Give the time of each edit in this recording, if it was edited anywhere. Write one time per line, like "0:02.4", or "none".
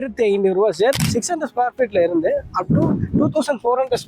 0:01.0